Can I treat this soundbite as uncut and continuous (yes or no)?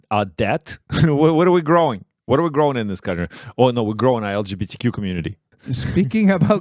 no